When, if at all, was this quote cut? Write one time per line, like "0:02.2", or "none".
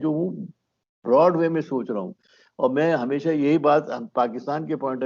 none